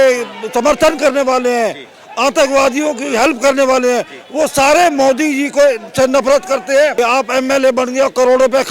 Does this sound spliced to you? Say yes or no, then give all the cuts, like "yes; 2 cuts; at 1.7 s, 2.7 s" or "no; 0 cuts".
yes; 1 cut; at 6.9 s